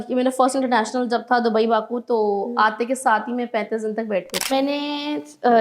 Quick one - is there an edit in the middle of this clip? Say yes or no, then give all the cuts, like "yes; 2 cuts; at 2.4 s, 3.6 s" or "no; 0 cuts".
yes; 1 cut; at 4.5 s